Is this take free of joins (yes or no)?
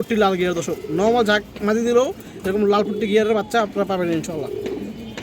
yes